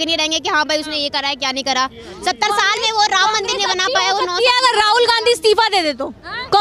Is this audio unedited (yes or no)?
yes